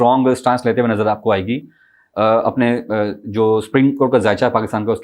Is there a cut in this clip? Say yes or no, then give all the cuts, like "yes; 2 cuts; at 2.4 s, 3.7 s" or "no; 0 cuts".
no; 0 cuts